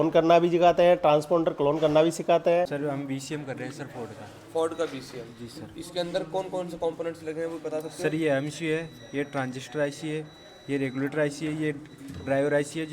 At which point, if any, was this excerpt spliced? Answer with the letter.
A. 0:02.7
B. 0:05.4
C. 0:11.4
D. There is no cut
A